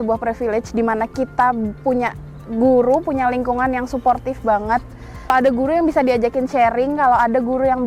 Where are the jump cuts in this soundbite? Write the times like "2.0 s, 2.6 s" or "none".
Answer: 5.3 s